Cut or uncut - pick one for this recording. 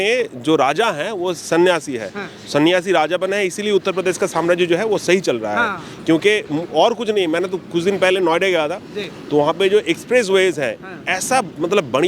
uncut